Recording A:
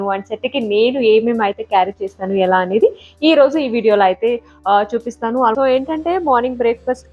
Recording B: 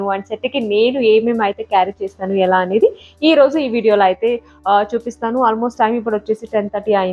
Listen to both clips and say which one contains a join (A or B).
A